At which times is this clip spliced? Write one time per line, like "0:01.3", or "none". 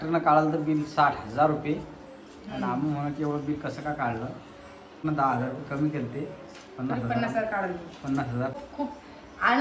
0:05.0
0:08.6